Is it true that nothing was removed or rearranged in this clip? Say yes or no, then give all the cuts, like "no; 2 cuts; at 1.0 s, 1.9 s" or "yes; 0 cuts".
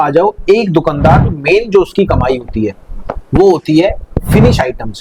yes; 0 cuts